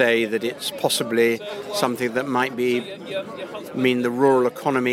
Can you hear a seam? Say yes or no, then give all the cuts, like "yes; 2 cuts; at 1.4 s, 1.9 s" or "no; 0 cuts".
no; 0 cuts